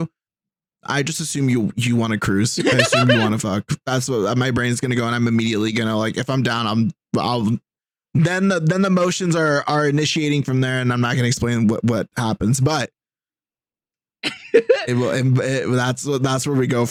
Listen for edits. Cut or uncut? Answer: uncut